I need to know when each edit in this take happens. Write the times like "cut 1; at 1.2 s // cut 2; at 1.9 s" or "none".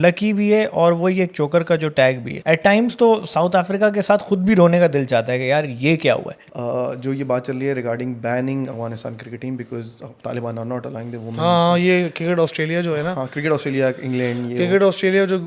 cut 1; at 2.3 s // cut 2; at 6.4 s